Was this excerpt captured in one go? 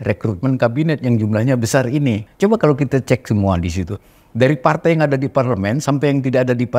no; 1 cut; at 2.3 s

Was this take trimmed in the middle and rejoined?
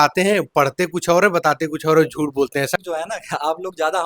yes; 1 cut; at 2.8 s

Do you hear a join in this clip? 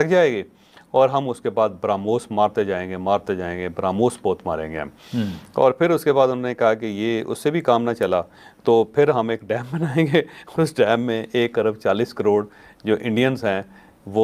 no; 0 cuts

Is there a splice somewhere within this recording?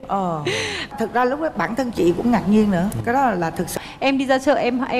yes; 1 cut; at 3.7 s

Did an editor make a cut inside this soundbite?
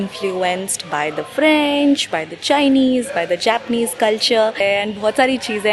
yes; 1 cut; at 4.6 s

